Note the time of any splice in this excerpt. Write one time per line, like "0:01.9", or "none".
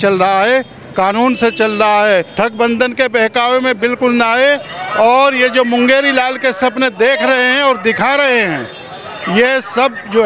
0:02.3